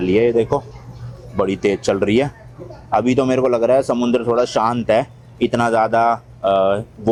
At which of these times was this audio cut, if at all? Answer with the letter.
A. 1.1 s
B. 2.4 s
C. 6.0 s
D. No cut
D